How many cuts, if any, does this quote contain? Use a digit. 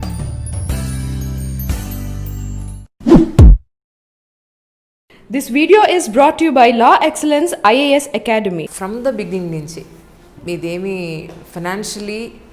1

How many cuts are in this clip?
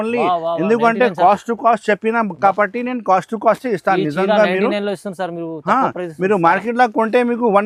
0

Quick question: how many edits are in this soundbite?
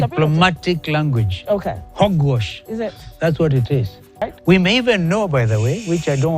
1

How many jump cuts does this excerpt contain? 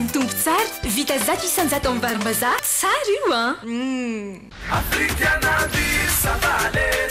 1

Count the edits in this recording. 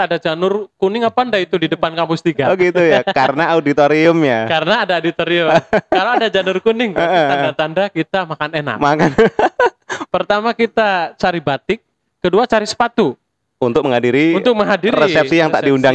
1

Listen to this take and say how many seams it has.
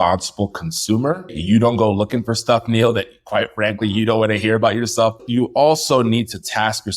2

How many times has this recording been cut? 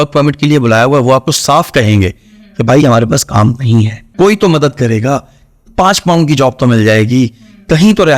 1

